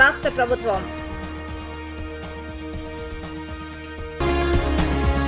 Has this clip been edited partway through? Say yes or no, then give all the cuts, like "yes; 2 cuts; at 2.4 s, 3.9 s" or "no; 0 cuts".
no; 0 cuts